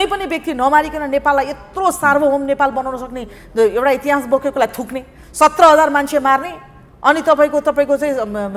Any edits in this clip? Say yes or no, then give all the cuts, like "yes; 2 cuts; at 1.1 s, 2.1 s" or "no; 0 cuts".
no; 0 cuts